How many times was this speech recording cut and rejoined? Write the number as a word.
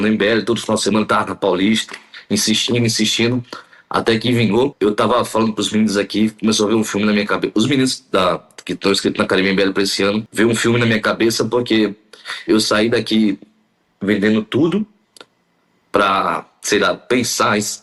zero